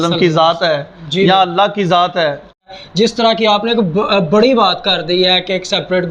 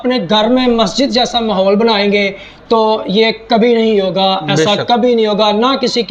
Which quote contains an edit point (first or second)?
first